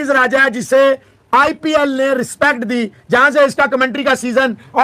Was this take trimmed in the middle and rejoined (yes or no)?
no